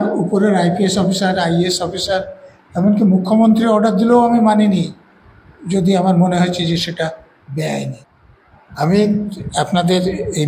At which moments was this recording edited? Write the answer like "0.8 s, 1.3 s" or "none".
8.0 s